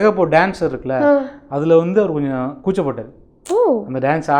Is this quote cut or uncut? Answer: uncut